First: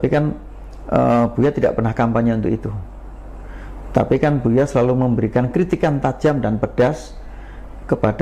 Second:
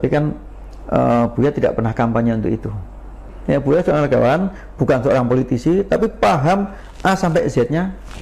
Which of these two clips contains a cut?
second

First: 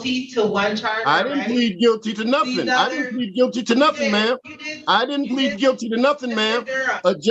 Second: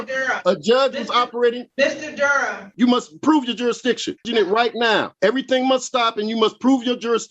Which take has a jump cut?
second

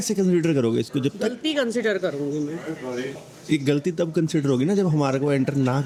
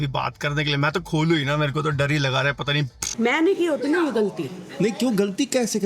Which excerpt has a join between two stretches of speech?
second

